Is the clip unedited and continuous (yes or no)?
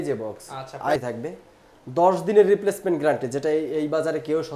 no